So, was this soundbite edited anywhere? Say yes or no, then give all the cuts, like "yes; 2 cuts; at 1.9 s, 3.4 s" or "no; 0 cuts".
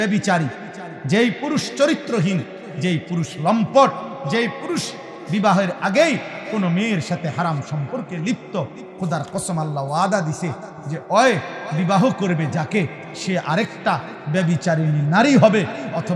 no; 0 cuts